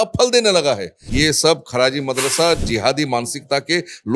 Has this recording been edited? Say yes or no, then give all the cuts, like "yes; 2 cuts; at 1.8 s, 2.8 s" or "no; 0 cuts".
yes; 1 cut; at 1.0 s